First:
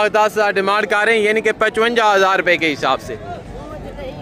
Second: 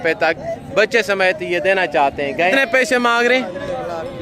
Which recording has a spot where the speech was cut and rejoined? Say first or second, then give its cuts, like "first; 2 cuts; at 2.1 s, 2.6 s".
second; 1 cut; at 2.5 s